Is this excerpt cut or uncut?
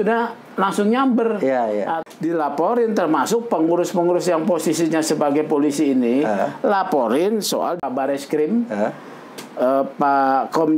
cut